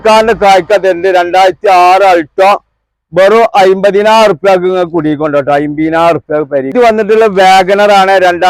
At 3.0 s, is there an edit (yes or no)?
no